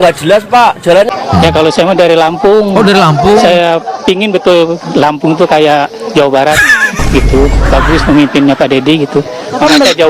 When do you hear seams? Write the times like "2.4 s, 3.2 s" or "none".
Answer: 1.1 s

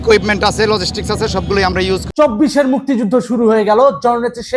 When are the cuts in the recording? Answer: 2.0 s

